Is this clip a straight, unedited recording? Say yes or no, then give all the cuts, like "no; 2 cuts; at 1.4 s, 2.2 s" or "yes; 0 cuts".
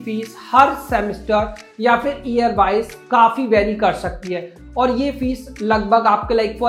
yes; 0 cuts